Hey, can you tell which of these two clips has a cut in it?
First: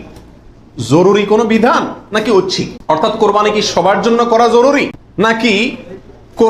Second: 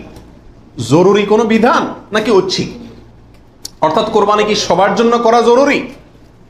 first; 2 cuts; at 2.7 s, 5.0 s

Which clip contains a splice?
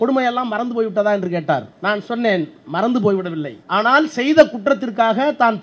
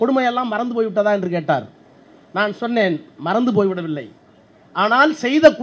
first; 2 cuts; at 1.7 s, 3.5 s

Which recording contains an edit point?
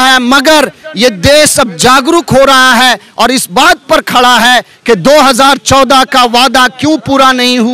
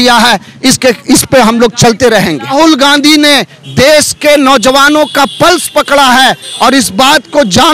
second; 1 cut; at 2.5 s

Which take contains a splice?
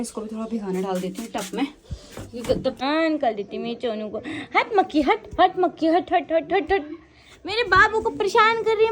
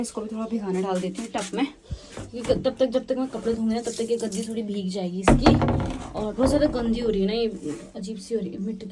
first; 1 cut; at 2.8 s

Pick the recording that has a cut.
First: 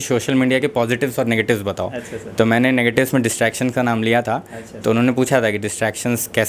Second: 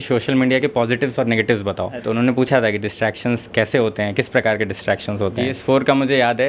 second; 2 cuts; at 1.9 s, 5.6 s

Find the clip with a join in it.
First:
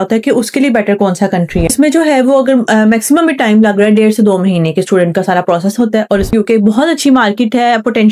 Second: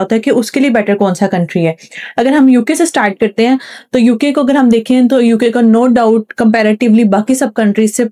first; 2 cuts; at 1.7 s, 6.3 s

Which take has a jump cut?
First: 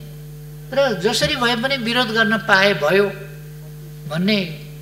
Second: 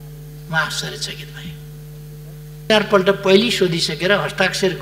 second; 1 cut; at 2.7 s

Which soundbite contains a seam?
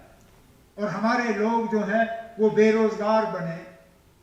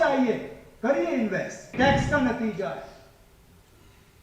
second; 1 cut; at 1.7 s

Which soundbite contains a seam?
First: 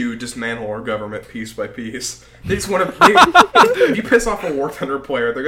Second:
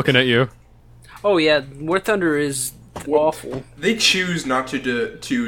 second; 1 cut; at 1.1 s

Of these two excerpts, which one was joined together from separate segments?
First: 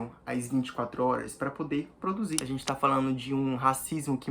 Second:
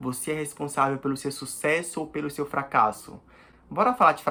first; 1 cut; at 2.4 s

